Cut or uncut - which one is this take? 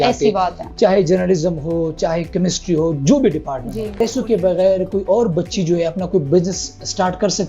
cut